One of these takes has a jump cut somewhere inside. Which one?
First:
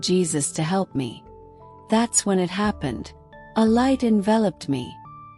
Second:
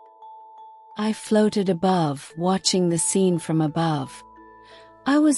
second; 1 cut; at 1.0 s

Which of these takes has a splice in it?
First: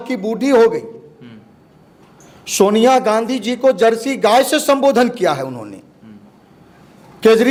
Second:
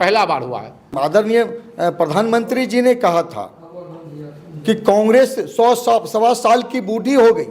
second; 1 cut; at 0.9 s

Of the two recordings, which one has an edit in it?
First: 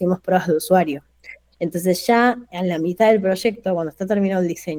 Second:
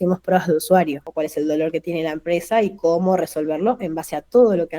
second; 1 cut; at 1.0 s

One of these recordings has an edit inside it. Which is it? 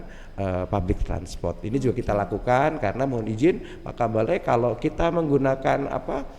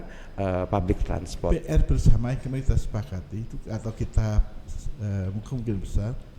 second; 1 cut; at 1.5 s

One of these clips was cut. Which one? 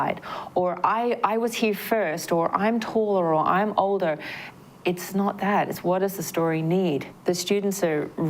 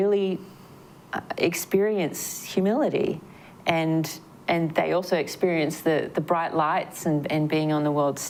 first; 1 cut; at 7.1 s

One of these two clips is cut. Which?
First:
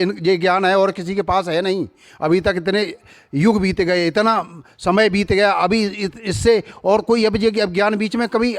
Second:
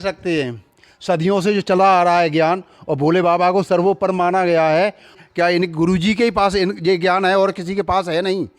second; 1 cut; at 5.1 s

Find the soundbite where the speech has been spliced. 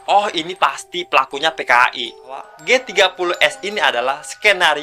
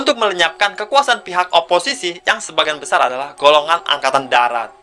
first; 1 cut; at 2.5 s

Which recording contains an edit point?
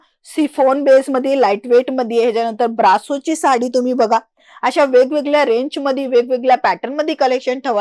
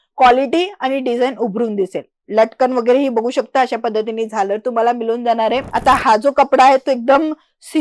second; 1 cut; at 5.7 s

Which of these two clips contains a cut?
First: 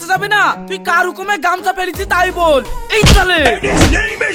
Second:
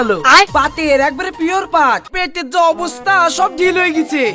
second; 1 cut; at 2.0 s

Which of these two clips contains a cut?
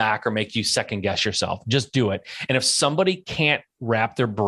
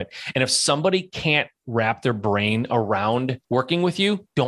second; 1 cut; at 3.4 s

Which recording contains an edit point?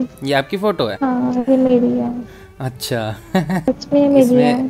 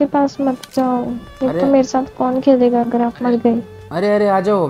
first; 2 cuts; at 0.9 s, 3.7 s

